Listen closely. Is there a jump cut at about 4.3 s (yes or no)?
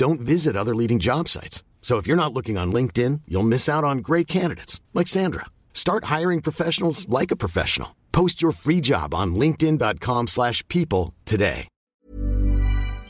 no